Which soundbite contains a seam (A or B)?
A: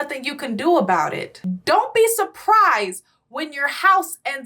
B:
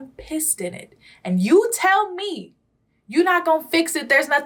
A